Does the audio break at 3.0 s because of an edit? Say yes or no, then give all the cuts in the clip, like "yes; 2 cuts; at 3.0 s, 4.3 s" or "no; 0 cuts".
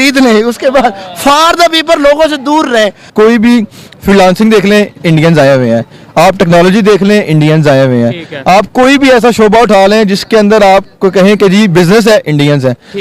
yes; 1 cut; at 3.0 s